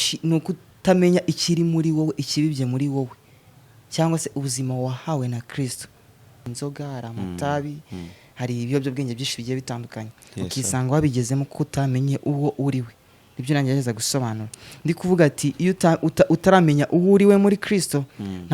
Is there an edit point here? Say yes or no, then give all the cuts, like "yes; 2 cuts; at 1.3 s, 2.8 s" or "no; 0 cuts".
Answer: yes; 1 cut; at 6.5 s